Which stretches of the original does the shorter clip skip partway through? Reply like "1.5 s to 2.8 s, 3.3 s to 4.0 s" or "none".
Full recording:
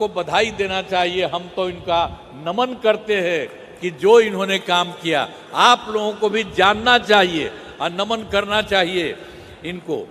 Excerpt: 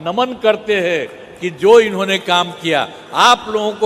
none